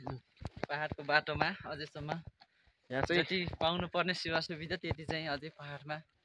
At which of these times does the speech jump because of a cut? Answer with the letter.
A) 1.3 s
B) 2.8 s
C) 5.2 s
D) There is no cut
D